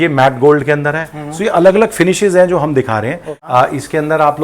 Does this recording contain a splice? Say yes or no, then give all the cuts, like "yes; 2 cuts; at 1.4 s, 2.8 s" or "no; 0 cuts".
yes; 1 cut; at 3.3 s